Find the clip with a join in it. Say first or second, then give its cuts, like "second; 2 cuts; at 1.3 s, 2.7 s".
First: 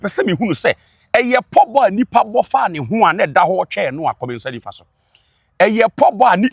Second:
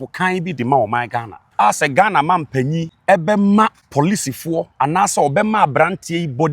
second; 3 cuts; at 1.4 s, 2.9 s, 3.8 s